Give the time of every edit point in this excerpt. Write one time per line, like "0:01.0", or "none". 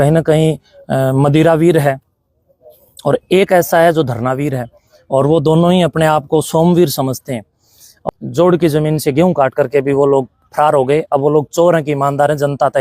0:07.9